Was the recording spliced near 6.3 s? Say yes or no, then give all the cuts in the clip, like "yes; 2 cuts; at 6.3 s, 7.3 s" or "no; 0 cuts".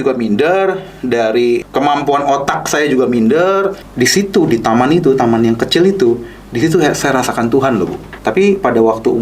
no; 3 cuts; at 1.7 s, 3.8 s, 8.1 s